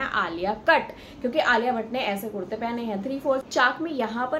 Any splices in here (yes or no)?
yes